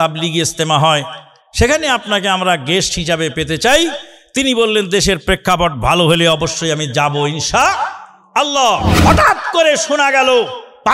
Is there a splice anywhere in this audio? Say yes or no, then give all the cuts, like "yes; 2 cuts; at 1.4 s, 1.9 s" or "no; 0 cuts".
yes; 1 cut; at 8.9 s